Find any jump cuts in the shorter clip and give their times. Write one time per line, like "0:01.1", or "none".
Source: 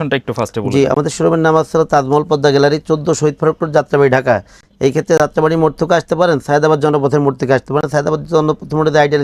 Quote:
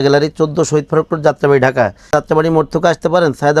0:02.1